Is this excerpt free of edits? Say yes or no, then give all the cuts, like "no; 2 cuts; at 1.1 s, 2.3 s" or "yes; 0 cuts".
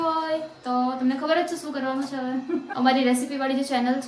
no; 1 cut; at 2.7 s